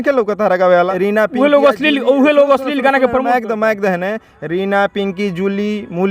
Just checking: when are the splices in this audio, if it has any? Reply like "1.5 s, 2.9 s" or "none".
0.9 s